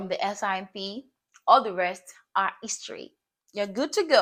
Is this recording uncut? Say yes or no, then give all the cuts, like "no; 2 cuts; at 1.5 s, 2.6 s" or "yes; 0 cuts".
yes; 0 cuts